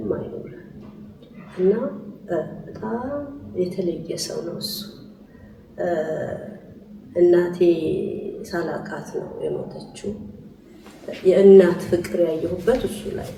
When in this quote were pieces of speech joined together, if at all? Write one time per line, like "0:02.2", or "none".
none

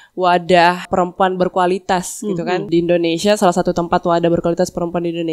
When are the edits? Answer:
0:00.9
0:02.6

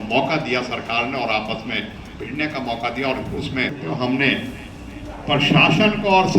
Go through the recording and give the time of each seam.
0:03.8

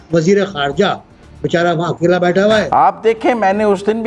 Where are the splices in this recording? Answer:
0:02.7

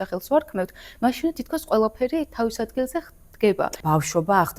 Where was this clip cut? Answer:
0:03.7

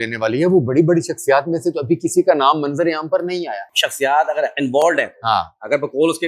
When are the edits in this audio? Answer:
0:03.6

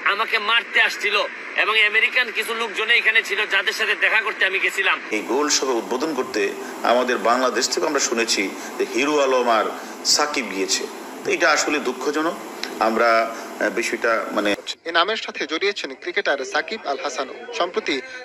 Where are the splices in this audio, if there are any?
0:05.1
0:14.5

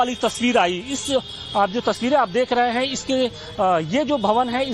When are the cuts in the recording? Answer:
0:03.4

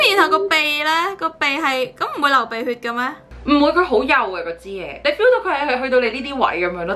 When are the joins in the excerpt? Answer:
none

